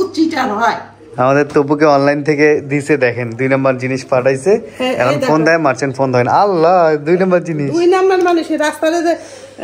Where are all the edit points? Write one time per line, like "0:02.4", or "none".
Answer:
0:00.9